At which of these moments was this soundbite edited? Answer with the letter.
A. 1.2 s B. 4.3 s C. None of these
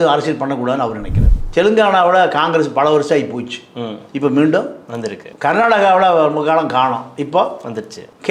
A